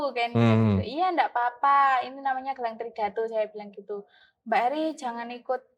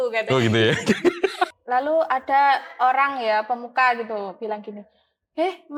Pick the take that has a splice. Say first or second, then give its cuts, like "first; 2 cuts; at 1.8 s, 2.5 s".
second; 1 cut; at 1.6 s